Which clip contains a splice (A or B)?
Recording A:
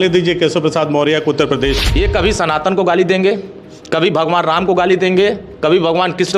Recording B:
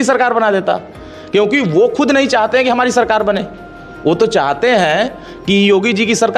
A